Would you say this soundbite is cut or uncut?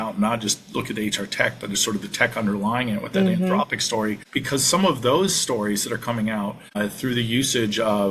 cut